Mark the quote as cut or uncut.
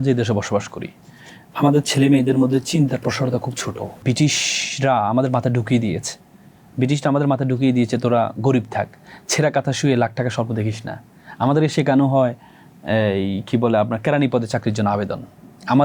cut